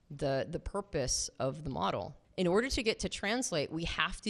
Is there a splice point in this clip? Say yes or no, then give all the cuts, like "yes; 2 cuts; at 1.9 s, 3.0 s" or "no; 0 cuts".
yes; 1 cut; at 2.2 s